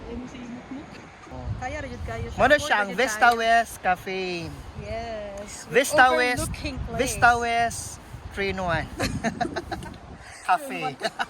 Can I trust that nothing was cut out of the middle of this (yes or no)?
no